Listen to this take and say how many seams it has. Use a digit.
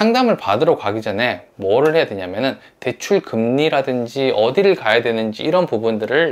0